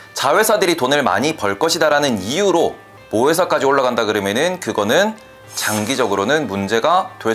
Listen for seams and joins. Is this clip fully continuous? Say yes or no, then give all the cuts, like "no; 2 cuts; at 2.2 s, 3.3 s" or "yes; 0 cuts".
yes; 0 cuts